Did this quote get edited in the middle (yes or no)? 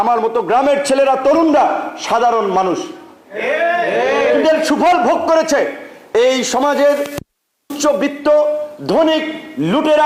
no